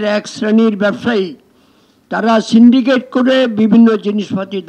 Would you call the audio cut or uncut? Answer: uncut